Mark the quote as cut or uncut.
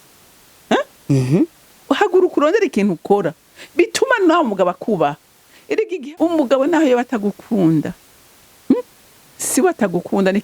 cut